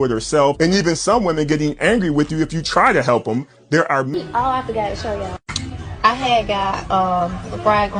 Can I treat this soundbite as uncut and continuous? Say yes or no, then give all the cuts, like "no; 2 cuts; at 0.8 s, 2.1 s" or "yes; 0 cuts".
no; 1 cut; at 4.1 s